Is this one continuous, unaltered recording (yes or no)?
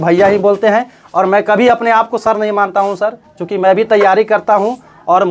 yes